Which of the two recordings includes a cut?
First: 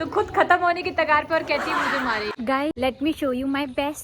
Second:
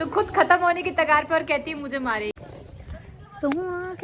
first; 1 cut; at 2.8 s

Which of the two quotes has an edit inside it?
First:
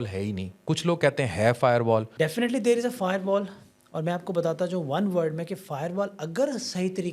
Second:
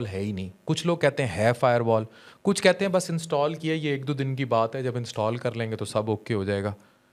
first; 1 cut; at 2.1 s

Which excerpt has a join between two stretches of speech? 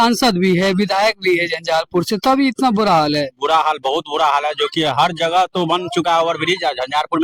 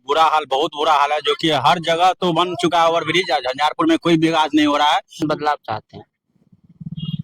second; 1 cut; at 5.2 s

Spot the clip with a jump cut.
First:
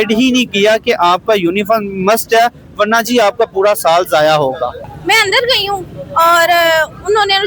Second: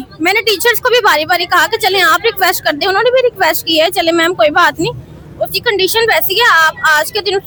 first; 1 cut; at 4.9 s

